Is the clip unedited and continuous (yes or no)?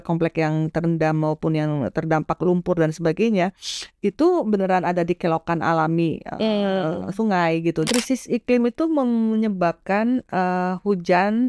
no